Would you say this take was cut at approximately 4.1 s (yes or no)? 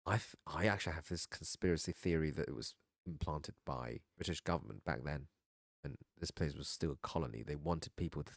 yes